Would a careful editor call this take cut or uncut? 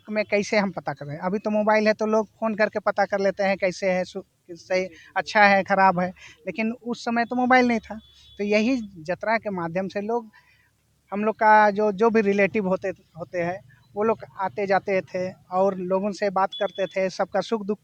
uncut